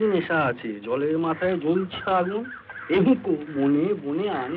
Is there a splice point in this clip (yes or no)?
no